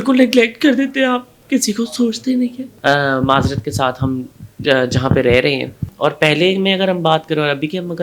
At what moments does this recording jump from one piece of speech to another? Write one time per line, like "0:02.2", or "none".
0:02.7
0:05.9

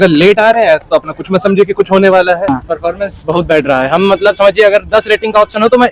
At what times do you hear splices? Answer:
0:02.5

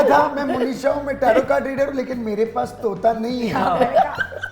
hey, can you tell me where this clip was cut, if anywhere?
none

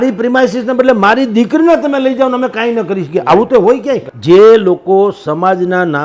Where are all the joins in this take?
0:04.1

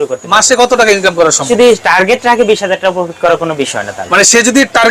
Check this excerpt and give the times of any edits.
0:01.5

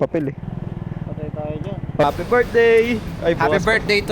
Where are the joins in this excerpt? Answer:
0:02.0

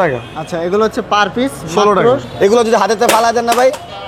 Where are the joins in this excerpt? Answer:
0:02.3

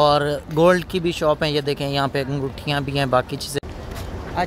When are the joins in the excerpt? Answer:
0:03.6

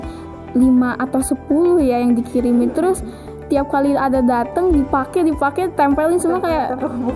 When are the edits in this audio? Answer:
none

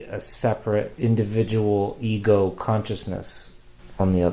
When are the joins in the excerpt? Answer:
0:00.9

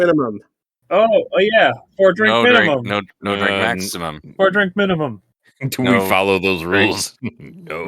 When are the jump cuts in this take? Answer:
0:00.9

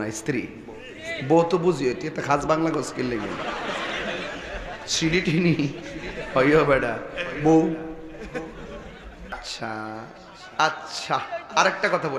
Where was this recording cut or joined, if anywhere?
0:09.4

